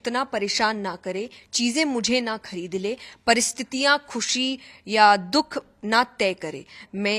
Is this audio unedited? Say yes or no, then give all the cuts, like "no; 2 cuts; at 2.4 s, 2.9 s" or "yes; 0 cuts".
yes; 0 cuts